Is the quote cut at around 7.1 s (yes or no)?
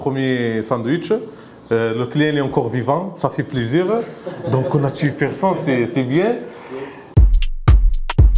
yes